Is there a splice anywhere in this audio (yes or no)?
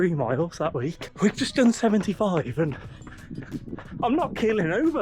yes